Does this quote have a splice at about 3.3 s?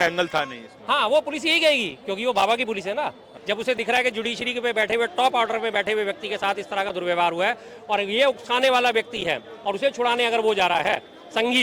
yes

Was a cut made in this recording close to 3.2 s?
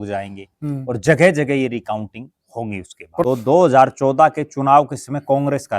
yes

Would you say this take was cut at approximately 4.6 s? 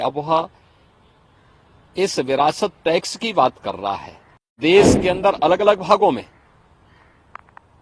yes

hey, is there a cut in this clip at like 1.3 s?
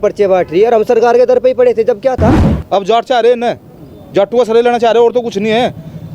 no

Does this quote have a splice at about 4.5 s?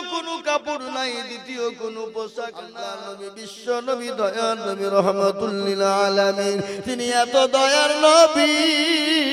no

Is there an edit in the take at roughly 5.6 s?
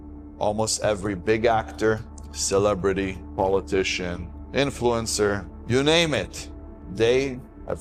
no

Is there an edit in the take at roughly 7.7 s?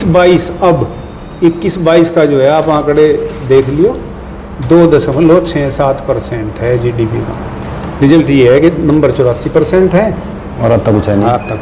yes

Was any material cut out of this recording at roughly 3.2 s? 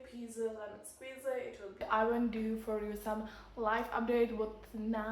no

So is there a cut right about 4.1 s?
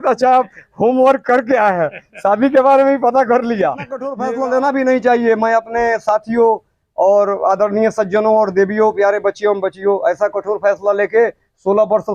yes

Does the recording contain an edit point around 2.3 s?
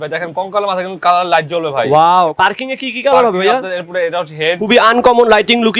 yes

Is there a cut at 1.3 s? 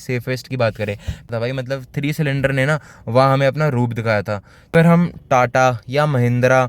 yes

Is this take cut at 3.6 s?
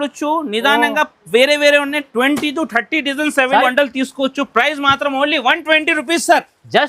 yes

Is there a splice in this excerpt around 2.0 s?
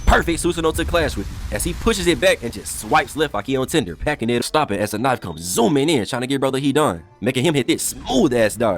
no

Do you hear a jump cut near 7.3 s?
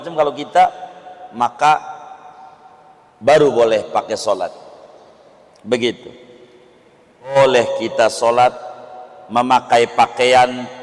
yes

